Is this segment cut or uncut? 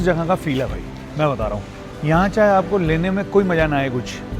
uncut